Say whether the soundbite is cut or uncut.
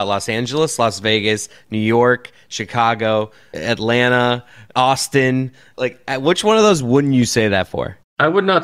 cut